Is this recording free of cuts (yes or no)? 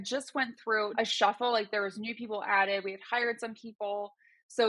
no